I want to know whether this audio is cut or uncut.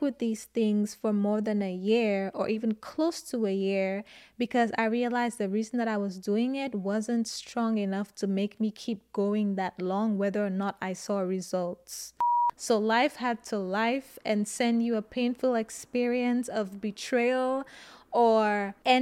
cut